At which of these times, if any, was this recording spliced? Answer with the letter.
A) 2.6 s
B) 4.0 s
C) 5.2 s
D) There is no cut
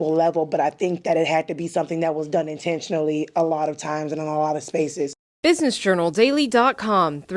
C